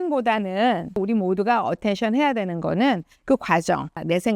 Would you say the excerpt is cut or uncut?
cut